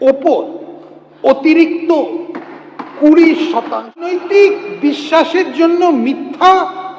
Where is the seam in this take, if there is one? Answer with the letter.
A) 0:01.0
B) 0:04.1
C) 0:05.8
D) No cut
B